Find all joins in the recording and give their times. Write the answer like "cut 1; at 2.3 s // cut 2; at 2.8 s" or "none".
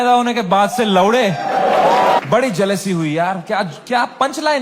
cut 1; at 2.2 s